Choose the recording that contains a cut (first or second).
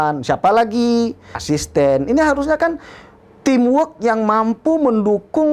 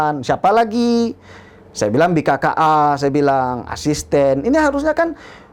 first